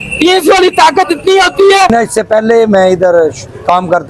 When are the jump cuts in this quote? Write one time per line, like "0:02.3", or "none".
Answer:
0:01.9